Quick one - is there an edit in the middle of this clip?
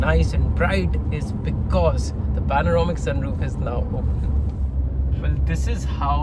no; 0 cuts

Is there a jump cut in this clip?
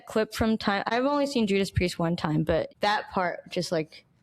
yes; 2 cuts; at 0.9 s, 2.7 s

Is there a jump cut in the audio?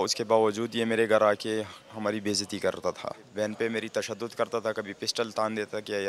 yes; 1 cut; at 3.3 s

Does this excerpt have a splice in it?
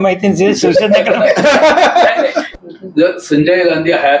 yes; 1 cut; at 2.4 s

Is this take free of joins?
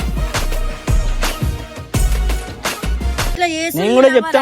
no; 1 cut; at 3.3 s

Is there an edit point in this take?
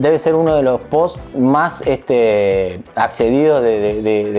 no; 0 cuts

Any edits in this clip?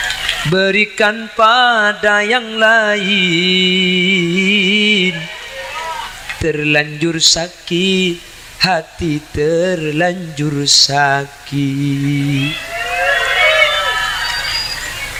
no; 0 cuts

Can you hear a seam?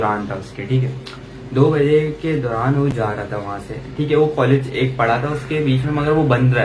no; 0 cuts

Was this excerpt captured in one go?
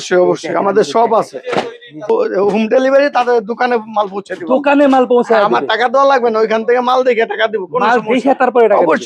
no; 1 cut; at 2.1 s

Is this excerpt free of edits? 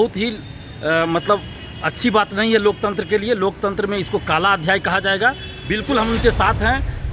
no; 1 cut; at 5.5 s

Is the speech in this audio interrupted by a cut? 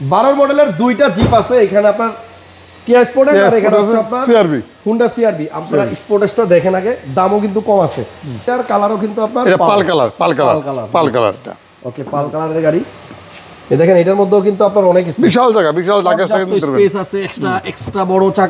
yes; 1 cut; at 8.5 s

